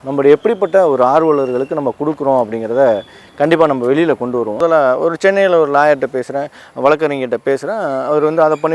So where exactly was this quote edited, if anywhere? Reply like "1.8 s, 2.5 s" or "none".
4.6 s